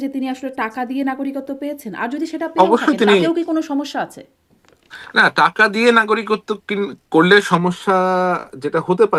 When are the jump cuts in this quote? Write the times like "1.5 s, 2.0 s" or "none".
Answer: none